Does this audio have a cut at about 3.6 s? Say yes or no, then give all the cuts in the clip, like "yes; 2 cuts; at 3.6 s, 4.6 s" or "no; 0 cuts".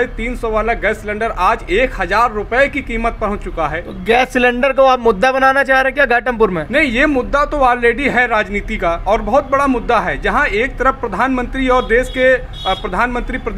no; 0 cuts